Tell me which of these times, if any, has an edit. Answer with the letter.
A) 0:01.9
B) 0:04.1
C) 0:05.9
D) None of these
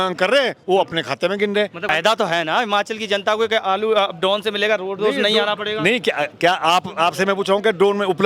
A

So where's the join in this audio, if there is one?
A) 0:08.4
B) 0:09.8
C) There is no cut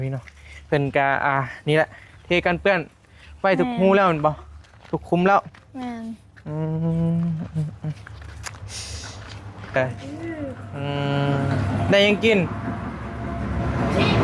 B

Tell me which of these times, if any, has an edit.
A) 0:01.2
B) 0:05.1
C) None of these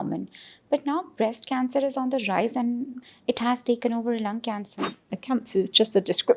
B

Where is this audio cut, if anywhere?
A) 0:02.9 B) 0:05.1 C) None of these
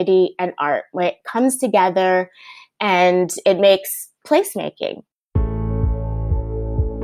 B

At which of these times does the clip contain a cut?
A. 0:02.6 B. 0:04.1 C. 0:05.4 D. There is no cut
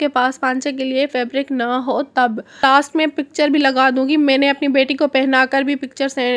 A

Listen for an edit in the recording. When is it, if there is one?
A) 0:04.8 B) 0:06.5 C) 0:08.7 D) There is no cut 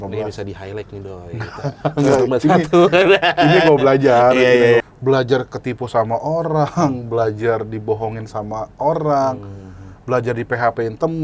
A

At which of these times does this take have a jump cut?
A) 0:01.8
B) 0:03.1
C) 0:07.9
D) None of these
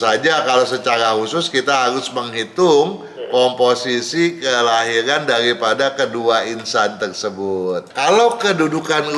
C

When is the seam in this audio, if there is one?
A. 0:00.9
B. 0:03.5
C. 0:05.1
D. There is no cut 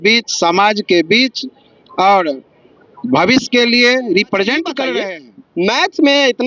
C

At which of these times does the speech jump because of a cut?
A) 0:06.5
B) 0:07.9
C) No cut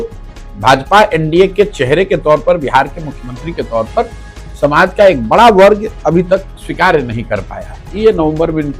B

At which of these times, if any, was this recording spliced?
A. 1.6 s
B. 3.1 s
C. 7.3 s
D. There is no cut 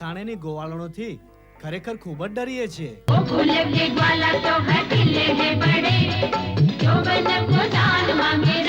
B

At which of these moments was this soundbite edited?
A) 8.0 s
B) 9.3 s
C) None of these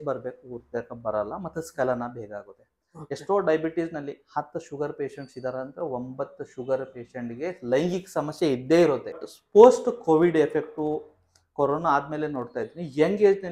B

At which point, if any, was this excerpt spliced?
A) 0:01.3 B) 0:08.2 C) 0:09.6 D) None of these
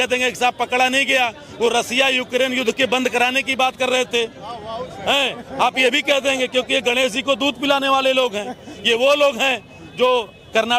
D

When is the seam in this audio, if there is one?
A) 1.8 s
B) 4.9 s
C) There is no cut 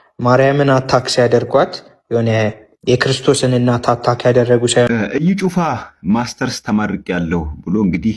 B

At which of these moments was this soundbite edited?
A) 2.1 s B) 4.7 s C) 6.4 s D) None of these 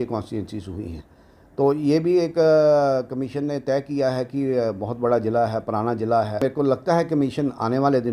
C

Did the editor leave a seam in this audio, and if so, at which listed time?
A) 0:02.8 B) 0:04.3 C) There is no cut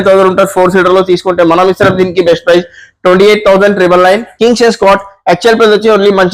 B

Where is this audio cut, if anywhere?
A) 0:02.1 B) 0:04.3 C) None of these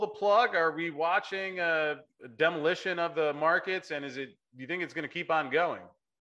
A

